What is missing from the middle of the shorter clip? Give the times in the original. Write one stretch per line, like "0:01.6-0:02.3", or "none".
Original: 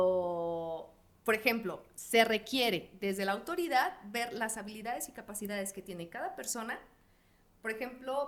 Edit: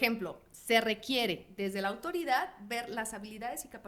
none